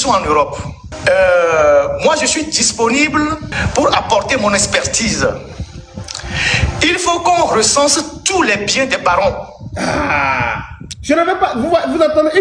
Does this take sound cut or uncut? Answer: uncut